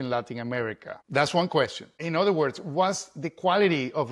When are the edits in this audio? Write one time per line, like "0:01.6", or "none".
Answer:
0:00.9
0:02.0